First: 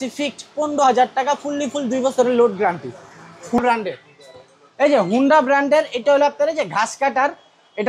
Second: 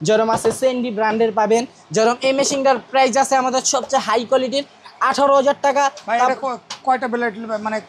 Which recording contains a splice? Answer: first; 1 cut; at 3.6 s

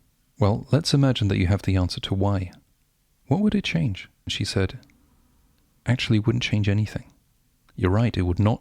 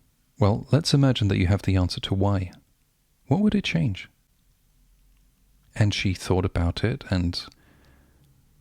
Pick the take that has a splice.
first; 1 cut; at 4.3 s

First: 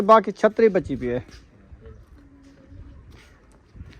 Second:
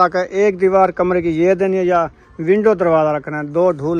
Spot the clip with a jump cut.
first; 1 cut; at 2.0 s

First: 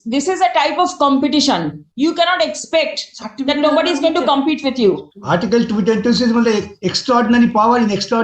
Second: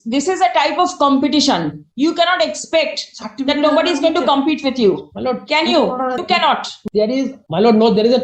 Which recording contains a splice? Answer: first; 1 cut; at 5.1 s

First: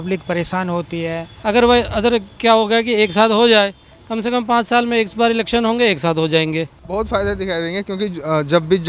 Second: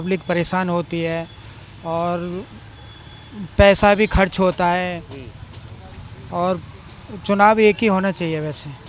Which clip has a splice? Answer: first; 2 cuts; at 1.3 s, 6.8 s

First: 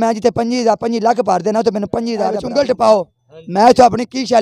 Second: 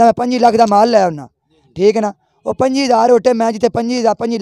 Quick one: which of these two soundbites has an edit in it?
first; 1 cut; at 2.5 s

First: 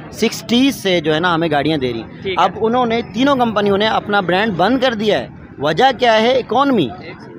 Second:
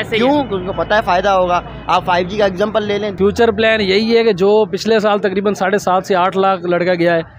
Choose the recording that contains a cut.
second; 1 cut; at 3.1 s

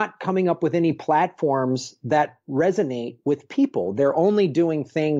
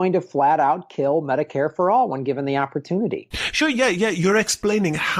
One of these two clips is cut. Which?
second; 1 cut; at 3.6 s

